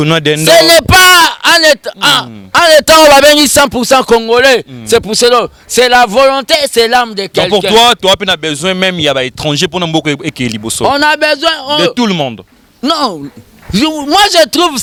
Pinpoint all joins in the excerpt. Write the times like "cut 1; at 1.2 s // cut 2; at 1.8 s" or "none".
none